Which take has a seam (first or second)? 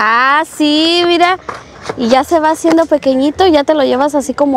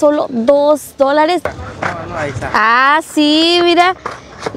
second